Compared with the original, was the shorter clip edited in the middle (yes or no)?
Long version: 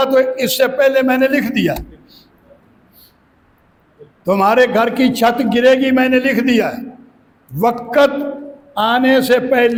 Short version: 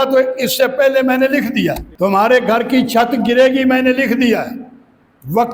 yes